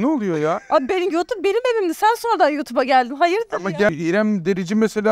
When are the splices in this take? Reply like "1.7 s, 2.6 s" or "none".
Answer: 3.9 s